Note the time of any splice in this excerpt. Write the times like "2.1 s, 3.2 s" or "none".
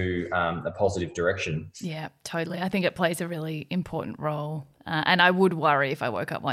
none